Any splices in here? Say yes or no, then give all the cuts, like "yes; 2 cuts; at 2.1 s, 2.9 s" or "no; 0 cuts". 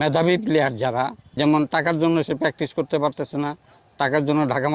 yes; 1 cut; at 1.2 s